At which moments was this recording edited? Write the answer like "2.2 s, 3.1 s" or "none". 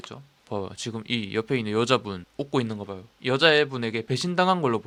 none